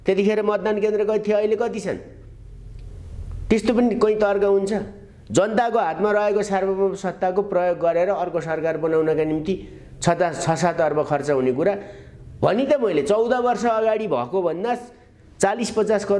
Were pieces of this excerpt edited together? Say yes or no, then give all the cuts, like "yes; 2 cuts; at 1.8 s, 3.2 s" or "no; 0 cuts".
no; 0 cuts